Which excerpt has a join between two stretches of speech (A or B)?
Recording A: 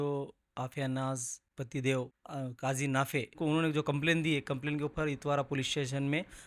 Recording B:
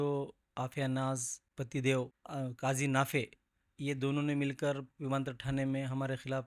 A